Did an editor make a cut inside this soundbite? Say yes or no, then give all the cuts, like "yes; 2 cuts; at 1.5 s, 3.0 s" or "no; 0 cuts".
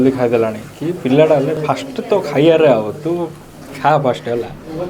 no; 0 cuts